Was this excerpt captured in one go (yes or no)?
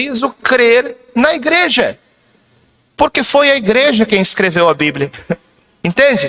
yes